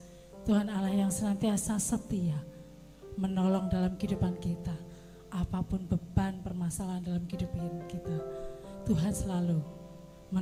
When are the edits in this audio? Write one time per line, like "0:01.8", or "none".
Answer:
none

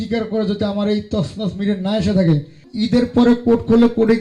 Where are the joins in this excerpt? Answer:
0:02.7

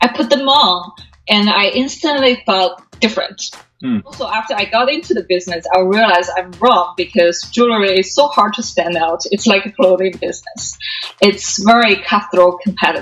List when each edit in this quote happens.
0:04.1

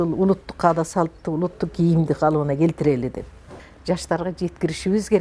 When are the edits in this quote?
0:03.4

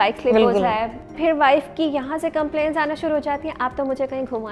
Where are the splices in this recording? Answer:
0:01.1

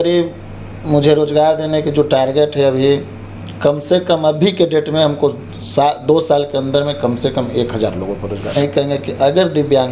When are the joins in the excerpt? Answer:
0:08.5

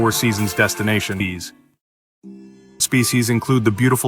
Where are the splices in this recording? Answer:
0:01.2
0:02.8

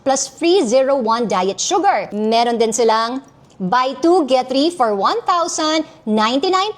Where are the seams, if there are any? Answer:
0:02.1

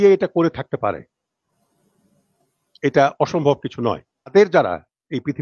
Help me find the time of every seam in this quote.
0:04.3

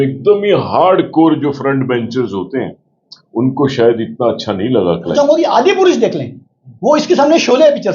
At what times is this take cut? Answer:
0:05.1

